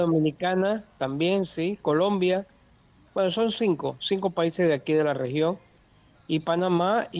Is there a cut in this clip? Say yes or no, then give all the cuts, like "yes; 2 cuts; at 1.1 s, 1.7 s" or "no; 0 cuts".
no; 0 cuts